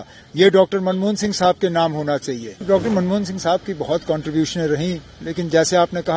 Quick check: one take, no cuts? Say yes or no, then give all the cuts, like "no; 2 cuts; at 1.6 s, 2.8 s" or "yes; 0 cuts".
no; 1 cut; at 2.6 s